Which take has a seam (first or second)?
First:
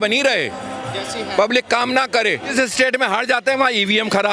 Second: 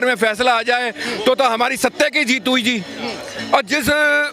first